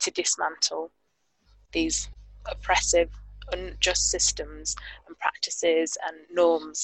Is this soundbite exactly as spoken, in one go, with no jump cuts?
yes; 0 cuts

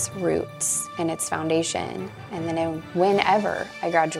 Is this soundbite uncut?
yes; 0 cuts

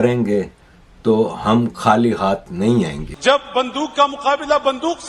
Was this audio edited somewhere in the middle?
yes; 1 cut; at 3.0 s

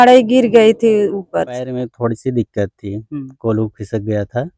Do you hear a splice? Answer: yes; 1 cut; at 1.8 s

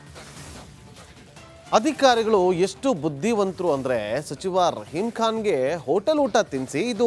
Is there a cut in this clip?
yes; 1 cut; at 1.1 s

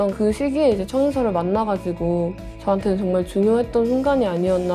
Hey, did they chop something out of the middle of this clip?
no; 0 cuts

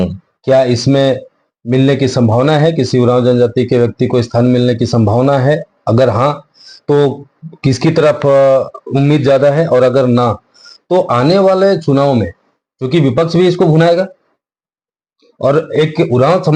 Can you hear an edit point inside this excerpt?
no; 0 cuts

